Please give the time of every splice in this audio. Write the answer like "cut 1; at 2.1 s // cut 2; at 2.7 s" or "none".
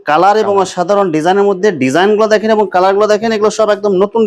none